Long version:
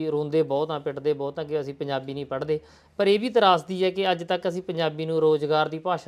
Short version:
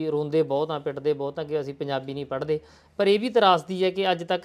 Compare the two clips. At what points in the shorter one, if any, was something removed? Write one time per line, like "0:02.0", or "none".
none